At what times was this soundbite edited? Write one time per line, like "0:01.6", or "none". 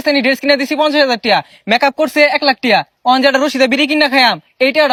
none